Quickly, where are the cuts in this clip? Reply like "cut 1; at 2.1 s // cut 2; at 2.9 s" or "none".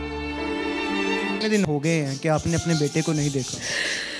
none